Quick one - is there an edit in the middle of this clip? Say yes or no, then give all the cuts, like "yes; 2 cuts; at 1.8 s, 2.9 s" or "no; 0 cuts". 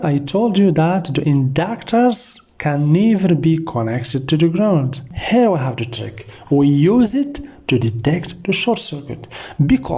yes; 1 cut; at 5.1 s